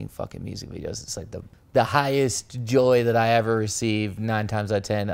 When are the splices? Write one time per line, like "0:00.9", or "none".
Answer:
0:01.6